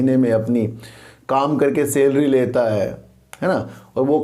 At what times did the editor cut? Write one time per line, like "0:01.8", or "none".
none